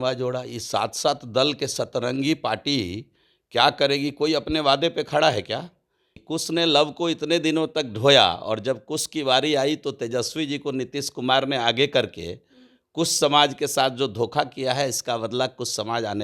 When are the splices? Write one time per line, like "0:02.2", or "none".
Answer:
0:06.1